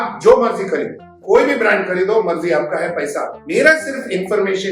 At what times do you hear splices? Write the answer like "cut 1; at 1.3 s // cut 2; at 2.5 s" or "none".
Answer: none